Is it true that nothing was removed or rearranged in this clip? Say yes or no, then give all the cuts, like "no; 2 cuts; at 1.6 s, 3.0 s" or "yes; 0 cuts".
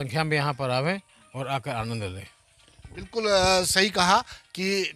yes; 0 cuts